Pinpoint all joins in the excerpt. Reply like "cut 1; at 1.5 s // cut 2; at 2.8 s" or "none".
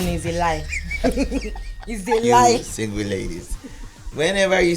cut 1; at 2.8 s